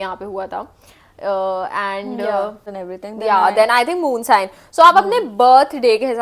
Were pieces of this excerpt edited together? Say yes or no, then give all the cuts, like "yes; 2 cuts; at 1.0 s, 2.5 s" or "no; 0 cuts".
yes; 1 cut; at 2.7 s